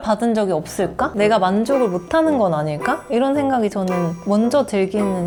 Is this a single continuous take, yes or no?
yes